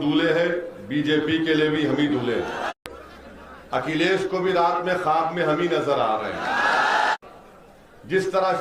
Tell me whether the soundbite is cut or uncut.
cut